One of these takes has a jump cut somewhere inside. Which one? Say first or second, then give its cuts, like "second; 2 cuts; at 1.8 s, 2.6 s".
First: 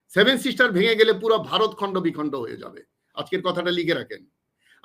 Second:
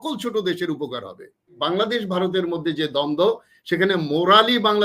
second; 1 cut; at 1.6 s